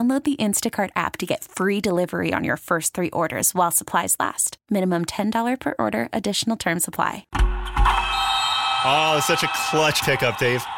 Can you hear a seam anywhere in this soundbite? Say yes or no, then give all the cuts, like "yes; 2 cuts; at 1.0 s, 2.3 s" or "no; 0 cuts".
yes; 1 cut; at 7.2 s